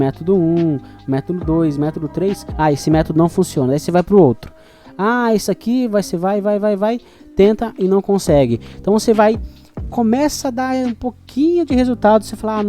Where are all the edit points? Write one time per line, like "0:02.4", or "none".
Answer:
0:02.5